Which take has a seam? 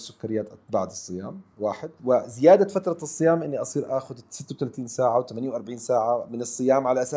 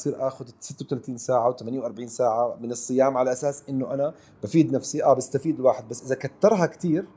first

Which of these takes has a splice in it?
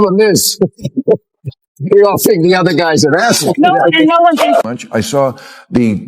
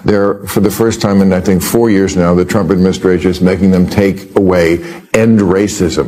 first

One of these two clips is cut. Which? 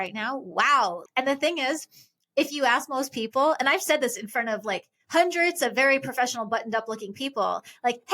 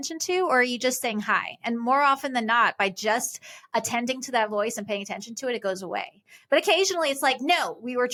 first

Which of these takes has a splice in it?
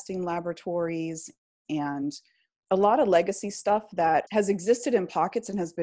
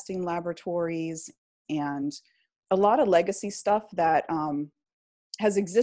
first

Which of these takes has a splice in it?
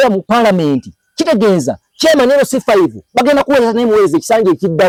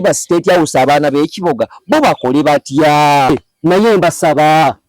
second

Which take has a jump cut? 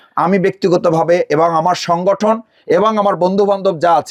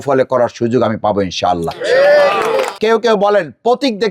second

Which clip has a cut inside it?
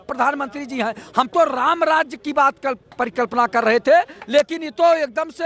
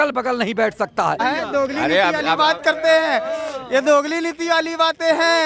second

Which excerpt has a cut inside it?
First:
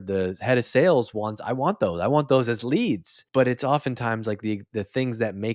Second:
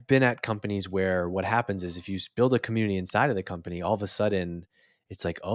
first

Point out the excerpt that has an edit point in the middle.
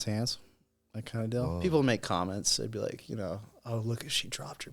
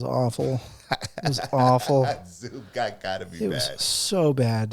first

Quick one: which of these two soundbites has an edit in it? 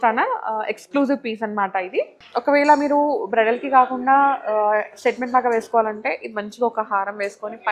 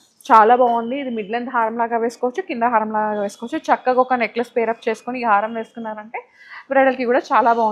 first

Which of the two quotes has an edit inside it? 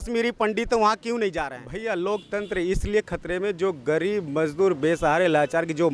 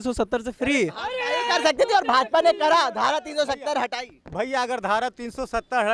first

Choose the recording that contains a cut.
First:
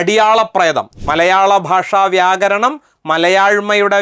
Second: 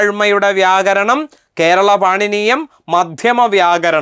first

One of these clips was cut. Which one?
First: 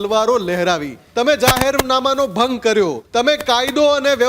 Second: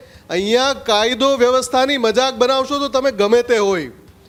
first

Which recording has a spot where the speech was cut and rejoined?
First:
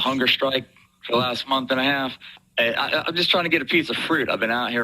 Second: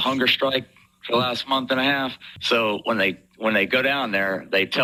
first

